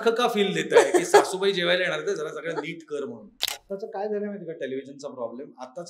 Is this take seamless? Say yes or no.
no